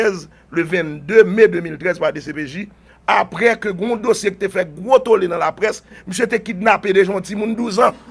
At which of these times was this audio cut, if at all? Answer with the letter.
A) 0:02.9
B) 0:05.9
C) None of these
A